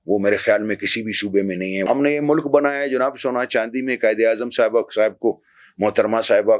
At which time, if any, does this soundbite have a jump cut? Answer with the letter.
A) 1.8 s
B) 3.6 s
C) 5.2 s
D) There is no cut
A